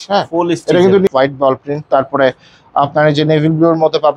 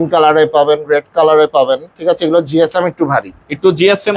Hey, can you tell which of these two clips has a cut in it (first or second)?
first